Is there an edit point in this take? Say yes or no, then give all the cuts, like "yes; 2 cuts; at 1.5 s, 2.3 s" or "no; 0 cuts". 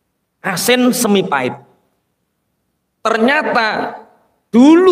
no; 0 cuts